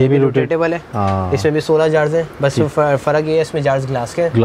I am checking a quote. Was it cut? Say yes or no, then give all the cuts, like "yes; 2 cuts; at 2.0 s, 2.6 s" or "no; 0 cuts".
no; 0 cuts